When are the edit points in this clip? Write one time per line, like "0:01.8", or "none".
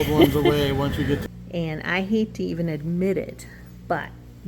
0:01.2

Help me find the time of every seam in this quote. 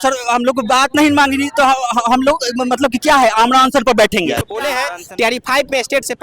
0:04.7

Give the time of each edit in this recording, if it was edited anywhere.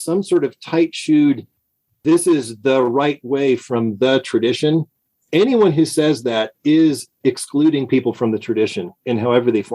none

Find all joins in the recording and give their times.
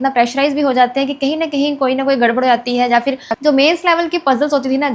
0:03.2

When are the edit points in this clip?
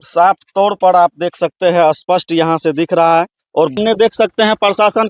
0:03.8

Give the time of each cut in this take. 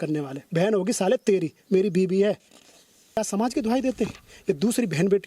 0:03.2

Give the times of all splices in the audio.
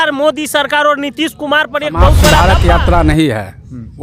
0:02.4

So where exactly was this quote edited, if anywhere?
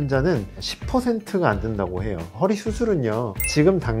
0:02.3

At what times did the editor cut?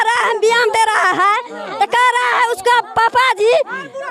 none

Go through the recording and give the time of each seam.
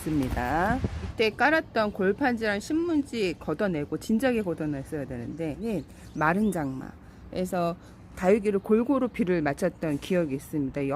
0:01.1
0:05.6

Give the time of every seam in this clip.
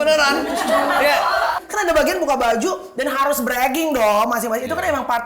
0:01.6

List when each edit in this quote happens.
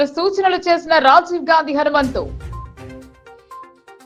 none

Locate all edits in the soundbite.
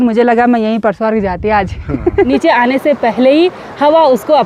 0:02.3

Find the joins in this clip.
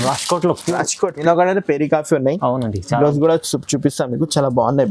0:01.2

